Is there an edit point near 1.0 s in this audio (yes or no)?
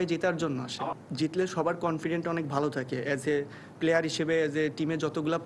yes